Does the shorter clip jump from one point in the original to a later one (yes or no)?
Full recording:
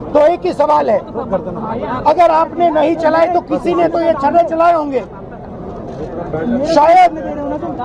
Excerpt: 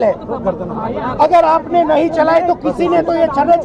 no